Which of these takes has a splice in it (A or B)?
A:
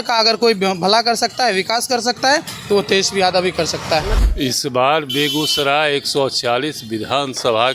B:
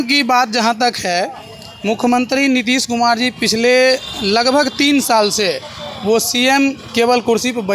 A